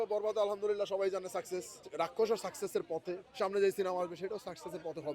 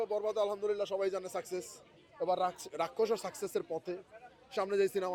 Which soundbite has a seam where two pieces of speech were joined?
first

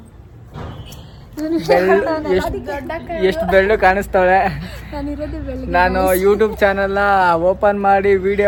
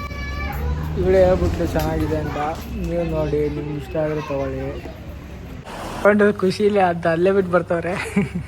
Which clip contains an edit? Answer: second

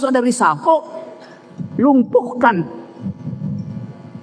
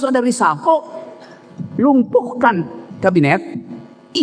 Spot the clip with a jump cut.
second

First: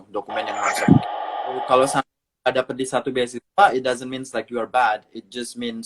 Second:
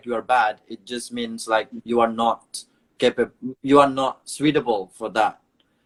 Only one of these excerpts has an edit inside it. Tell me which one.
first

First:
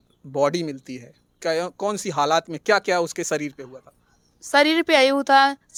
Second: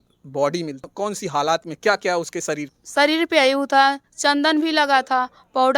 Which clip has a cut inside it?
second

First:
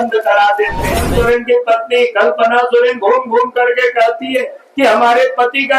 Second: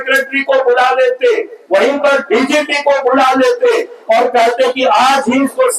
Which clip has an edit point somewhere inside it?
first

